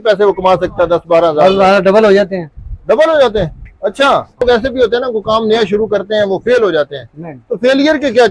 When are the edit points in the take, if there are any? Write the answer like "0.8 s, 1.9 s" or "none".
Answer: 4.4 s